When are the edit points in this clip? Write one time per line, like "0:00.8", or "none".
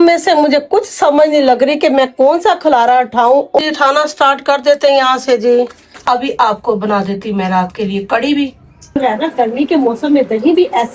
0:03.6
0:06.0
0:09.0